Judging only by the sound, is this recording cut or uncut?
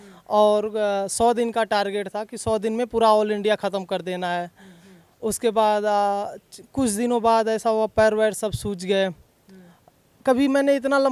uncut